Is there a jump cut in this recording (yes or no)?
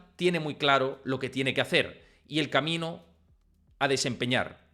no